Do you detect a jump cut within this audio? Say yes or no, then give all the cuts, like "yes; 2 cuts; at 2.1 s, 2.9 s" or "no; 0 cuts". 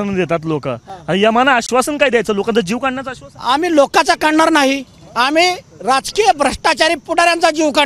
no; 0 cuts